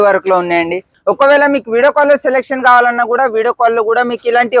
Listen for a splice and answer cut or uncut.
cut